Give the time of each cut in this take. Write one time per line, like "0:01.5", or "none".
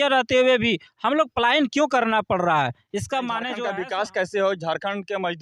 0:03.5